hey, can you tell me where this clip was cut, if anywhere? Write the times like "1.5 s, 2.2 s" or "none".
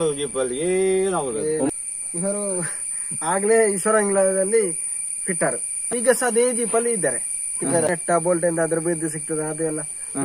7.9 s